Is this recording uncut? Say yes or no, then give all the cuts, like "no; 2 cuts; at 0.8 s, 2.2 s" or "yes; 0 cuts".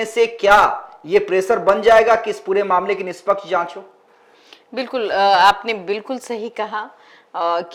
yes; 0 cuts